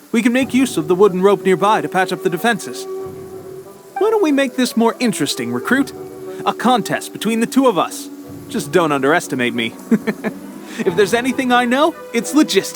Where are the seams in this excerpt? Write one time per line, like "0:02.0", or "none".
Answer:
none